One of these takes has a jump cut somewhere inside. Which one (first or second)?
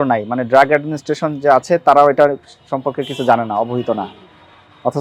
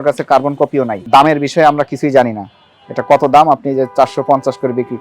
second